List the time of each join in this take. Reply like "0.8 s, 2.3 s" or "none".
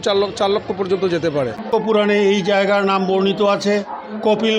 1.5 s